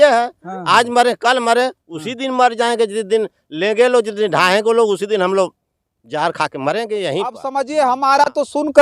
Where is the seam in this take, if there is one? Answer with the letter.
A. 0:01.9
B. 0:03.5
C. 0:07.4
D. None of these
C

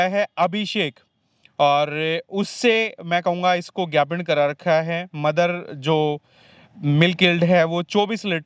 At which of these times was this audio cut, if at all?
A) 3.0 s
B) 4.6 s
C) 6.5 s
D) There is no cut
D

